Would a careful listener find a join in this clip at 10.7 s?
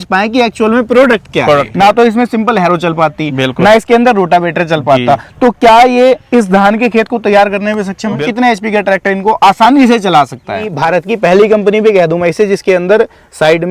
yes; 3 cuts; at 1.7 s, 8.2 s, 10.7 s

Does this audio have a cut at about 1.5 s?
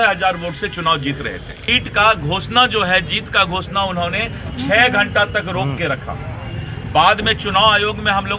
yes; 1 cut; at 1.5 s

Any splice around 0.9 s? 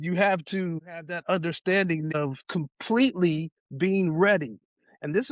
yes; 2 cuts; at 0.9 s, 2.3 s

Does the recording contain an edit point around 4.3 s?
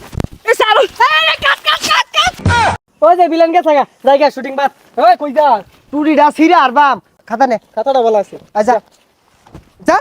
no; 2 cuts; at 2.6 s, 7.1 s

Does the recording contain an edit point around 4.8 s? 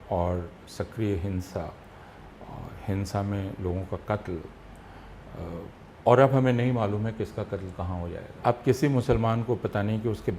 no; 1 cut; at 8.4 s

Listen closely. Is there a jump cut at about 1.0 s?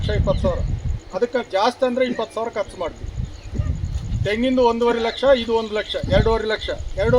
no; 0 cuts

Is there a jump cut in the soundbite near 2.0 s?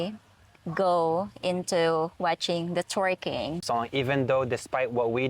no; 1 cut; at 3.6 s

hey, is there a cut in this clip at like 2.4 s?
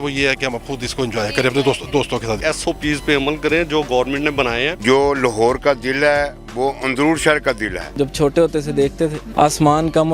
yes; 4 cuts; at 2.4 s, 4.8 s, 7.9 s, 9.2 s

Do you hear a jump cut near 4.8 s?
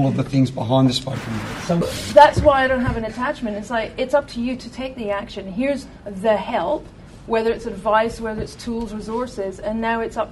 no; 1 cut; at 1.8 s

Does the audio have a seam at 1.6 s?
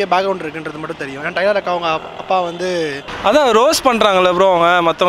no; 1 cut; at 3.0 s

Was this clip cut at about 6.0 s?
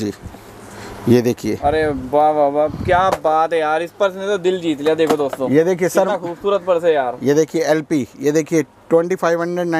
no; 0 cuts

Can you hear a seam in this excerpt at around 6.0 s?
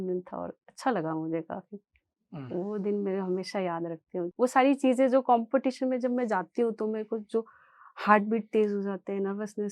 no; 1 cut; at 4.3 s

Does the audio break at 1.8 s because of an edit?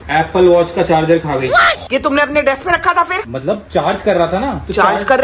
yes; 1 cut; at 1.8 s

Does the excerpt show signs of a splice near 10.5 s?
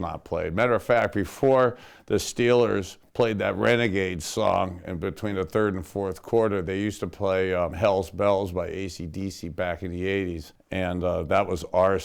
yes; 2 cuts; at 7.7 s, 10.5 s

